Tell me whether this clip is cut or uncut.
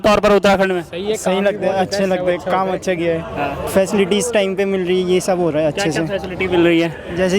cut